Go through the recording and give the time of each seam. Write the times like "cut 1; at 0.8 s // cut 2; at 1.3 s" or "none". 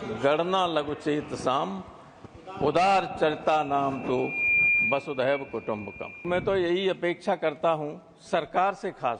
cut 1; at 6.3 s

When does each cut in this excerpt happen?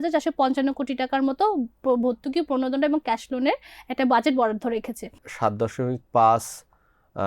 cut 1; at 5.2 s

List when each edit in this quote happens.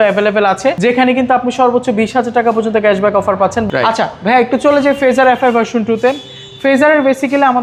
none

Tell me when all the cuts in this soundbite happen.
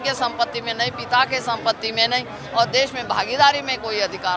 none

